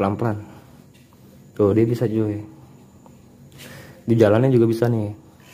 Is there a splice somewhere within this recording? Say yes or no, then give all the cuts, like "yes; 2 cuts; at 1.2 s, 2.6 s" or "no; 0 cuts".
no; 0 cuts